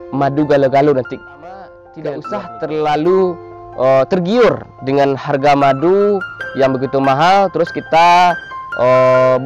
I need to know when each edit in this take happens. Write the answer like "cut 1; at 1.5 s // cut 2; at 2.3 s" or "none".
cut 1; at 1.8 s